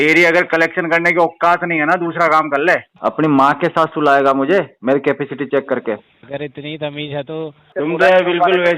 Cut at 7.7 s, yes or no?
yes